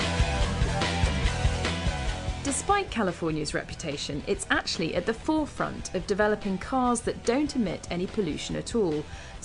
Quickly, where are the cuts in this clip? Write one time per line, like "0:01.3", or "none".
0:06.6